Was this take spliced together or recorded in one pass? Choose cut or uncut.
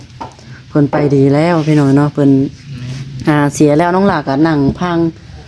uncut